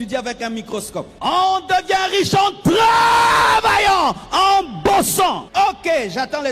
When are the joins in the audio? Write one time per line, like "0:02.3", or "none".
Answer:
0:01.1
0:05.4